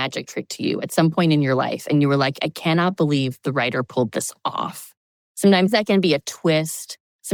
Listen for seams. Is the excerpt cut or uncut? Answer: uncut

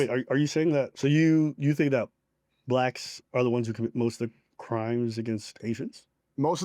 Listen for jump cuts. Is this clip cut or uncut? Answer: cut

